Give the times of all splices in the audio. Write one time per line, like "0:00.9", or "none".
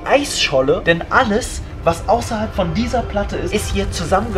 0:03.5